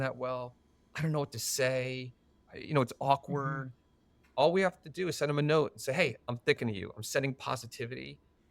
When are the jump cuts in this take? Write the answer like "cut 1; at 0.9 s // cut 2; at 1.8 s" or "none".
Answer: cut 1; at 2.5 s

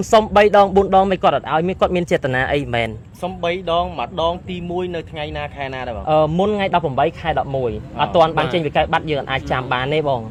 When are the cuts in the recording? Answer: none

